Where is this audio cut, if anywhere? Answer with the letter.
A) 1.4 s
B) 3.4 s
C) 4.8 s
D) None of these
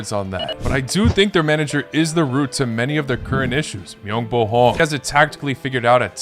C